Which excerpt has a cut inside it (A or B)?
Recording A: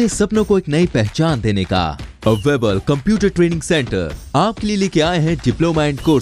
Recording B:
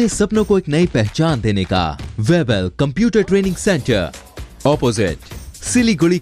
B